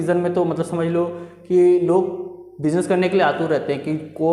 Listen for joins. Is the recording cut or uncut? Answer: uncut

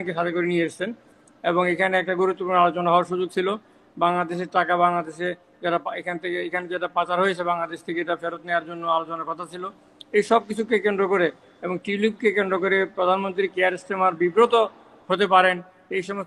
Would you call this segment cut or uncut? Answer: uncut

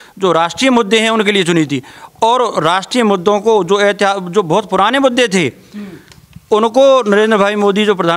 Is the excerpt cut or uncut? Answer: uncut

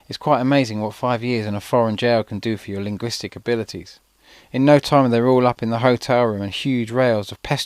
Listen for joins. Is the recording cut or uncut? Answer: cut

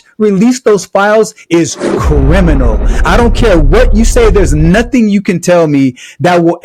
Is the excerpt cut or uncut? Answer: uncut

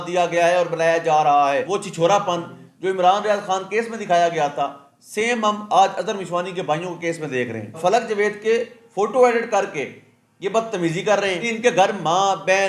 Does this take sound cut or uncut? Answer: cut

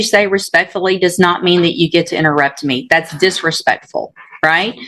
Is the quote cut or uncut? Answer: uncut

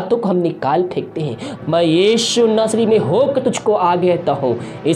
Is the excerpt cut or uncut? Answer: cut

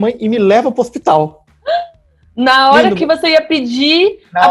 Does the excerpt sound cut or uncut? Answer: uncut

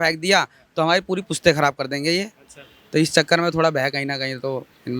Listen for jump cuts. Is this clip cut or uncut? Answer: uncut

